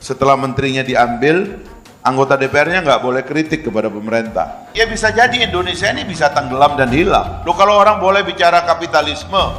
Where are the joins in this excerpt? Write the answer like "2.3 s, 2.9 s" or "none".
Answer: 4.6 s, 7.3 s